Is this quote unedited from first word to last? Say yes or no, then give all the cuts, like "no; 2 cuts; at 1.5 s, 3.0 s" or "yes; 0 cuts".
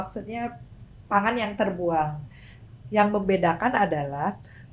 yes; 0 cuts